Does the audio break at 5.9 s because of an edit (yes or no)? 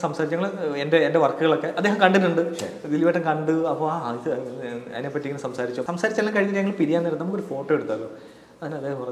yes